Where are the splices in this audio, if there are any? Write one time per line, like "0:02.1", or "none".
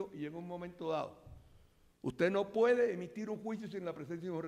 none